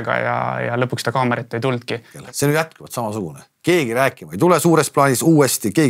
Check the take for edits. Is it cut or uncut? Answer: cut